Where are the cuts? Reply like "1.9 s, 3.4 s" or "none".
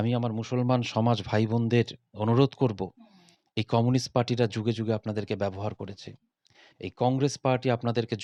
none